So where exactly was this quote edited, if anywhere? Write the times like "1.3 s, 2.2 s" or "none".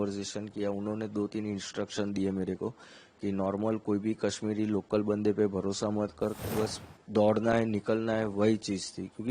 6.4 s